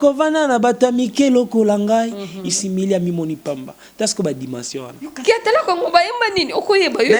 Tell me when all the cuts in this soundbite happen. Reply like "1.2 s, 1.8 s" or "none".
5.0 s